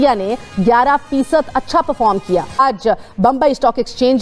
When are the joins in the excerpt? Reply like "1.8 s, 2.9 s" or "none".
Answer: 2.6 s